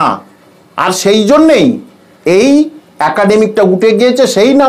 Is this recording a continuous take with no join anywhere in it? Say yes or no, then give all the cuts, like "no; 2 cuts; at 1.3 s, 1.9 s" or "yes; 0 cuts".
yes; 0 cuts